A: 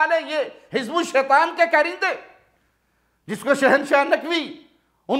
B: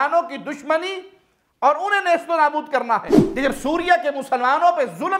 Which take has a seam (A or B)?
B